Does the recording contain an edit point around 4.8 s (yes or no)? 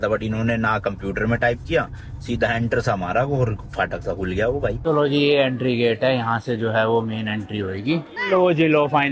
yes